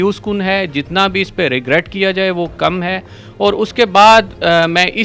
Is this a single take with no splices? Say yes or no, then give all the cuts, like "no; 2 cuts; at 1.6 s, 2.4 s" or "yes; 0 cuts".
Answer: yes; 0 cuts